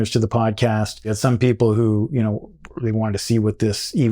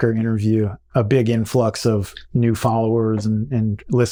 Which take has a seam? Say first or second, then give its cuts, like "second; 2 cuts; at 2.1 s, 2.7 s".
first; 1 cut; at 1.1 s